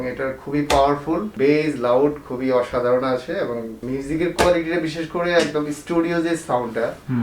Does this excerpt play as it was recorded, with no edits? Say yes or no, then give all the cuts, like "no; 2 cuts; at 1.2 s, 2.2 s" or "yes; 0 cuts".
no; 2 cuts; at 1.3 s, 3.8 s